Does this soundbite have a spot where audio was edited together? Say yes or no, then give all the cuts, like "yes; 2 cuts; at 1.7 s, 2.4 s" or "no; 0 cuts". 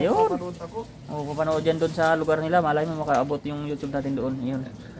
no; 0 cuts